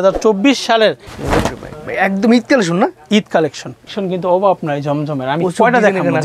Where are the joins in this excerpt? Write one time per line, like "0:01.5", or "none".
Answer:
0:01.1
0:04.0